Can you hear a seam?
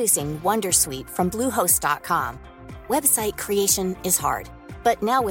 no; 0 cuts

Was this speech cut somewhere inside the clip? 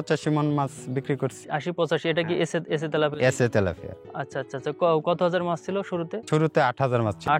yes; 1 cut; at 1.4 s

